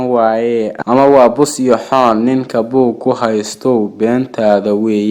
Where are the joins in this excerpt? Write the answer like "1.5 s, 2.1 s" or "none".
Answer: none